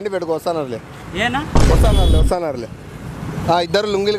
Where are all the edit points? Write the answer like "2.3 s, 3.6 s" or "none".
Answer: none